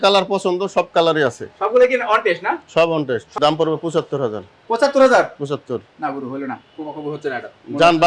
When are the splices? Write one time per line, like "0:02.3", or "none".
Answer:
0:03.3